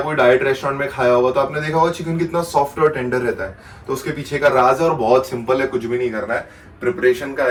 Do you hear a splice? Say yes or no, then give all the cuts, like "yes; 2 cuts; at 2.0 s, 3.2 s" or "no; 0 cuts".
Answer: no; 0 cuts